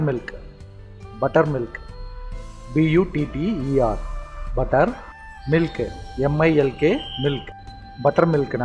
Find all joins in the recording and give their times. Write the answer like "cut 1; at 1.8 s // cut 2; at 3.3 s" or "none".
cut 1; at 5.5 s